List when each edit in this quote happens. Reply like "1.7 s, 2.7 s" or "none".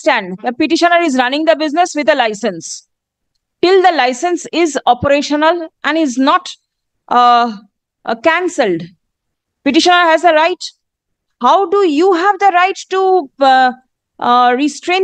none